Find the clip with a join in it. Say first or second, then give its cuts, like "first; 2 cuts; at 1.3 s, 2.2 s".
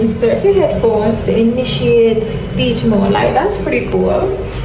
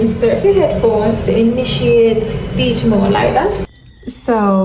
second; 1 cut; at 3.6 s